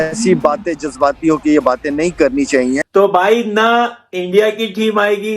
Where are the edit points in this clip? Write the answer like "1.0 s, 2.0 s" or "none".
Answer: 2.8 s